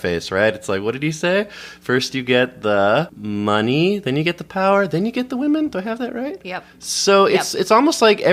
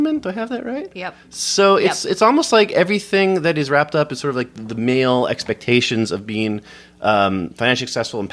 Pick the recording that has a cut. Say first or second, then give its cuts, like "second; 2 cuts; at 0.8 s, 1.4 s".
first; 1 cut; at 3.2 s